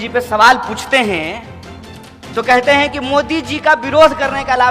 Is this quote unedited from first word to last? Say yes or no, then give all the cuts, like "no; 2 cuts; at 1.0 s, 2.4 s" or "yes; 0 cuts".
yes; 0 cuts